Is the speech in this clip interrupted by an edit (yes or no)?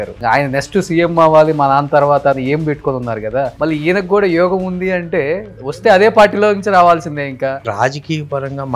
yes